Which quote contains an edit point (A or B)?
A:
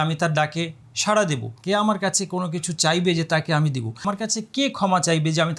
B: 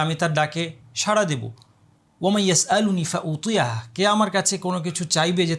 A